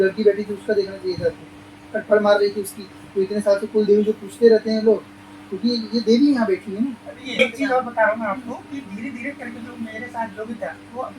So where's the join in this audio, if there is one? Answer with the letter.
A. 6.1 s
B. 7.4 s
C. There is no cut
B